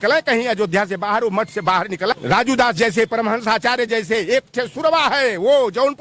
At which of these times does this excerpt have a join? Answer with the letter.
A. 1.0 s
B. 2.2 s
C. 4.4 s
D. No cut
B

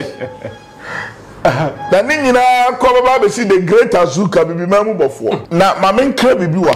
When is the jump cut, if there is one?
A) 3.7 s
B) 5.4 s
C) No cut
B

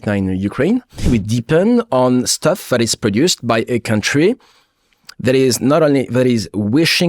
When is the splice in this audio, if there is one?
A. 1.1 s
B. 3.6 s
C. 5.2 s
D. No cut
A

